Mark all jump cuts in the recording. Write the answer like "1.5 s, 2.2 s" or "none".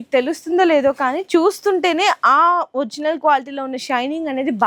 none